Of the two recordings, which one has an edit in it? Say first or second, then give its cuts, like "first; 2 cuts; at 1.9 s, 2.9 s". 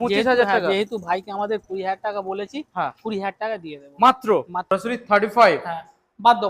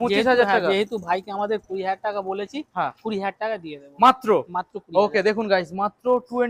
first; 1 cut; at 4.7 s